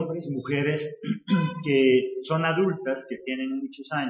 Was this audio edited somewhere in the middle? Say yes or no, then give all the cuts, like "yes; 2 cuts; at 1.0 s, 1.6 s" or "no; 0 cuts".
no; 0 cuts